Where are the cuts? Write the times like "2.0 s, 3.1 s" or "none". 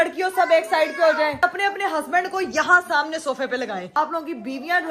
1.4 s, 4.0 s